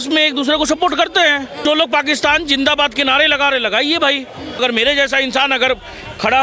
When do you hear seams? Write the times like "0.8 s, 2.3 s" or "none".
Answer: 1.5 s, 4.6 s